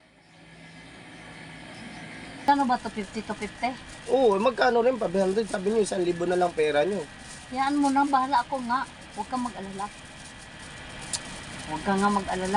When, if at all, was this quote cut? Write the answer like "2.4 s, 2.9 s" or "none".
2.5 s